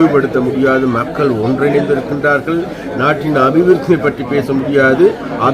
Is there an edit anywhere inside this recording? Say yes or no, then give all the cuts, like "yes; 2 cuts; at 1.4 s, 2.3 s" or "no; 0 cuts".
no; 0 cuts